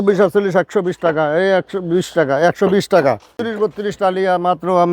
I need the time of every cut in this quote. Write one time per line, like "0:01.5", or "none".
0:03.5